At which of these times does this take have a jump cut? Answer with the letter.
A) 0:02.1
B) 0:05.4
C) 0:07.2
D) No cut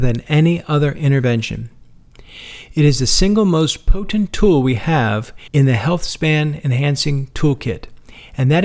B